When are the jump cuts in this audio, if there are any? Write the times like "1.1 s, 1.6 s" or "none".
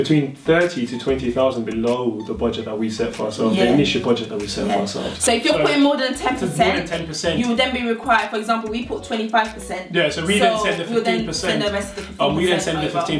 5.2 s